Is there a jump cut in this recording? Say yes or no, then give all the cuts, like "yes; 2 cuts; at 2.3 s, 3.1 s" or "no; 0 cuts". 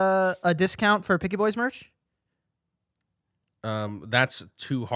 no; 0 cuts